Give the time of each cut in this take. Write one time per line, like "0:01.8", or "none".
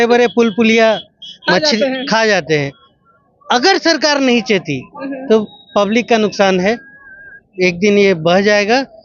none